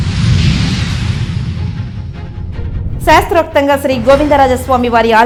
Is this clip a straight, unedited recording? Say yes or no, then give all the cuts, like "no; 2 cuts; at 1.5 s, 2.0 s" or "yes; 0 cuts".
yes; 0 cuts